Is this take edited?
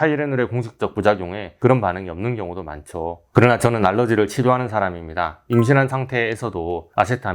yes; 1 cut; at 3.2 s

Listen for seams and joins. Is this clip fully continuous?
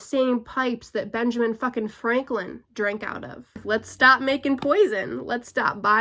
no; 1 cut; at 3.6 s

